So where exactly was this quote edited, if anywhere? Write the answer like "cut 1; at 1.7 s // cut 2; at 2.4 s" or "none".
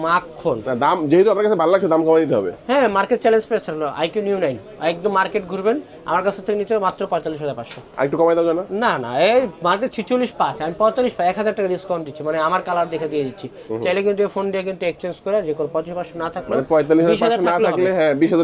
none